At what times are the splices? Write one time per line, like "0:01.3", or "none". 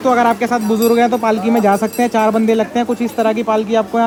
none